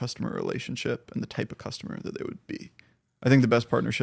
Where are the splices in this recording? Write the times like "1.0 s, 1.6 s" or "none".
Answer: none